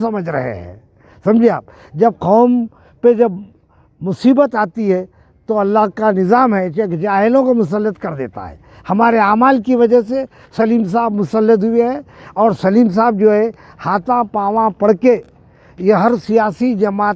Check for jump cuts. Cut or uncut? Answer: uncut